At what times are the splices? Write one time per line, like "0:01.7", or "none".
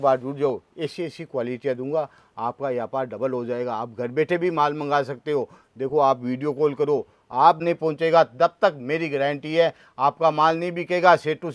0:07.6